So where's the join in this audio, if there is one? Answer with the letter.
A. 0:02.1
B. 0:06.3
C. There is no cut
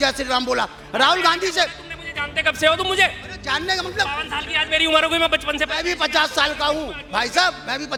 C